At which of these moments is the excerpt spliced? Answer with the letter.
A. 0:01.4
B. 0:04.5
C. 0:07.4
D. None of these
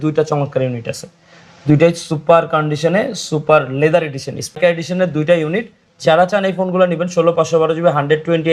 B